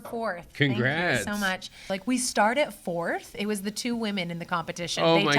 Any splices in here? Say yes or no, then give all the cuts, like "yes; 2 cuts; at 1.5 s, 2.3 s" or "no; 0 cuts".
yes; 1 cut; at 1.9 s